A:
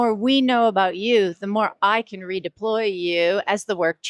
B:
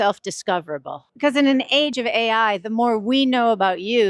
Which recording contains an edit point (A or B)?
B